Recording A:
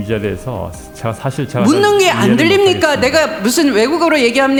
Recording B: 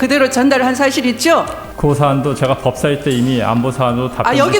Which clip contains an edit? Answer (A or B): B